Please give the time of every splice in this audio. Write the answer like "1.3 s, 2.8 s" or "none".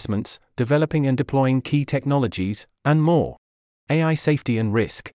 3.2 s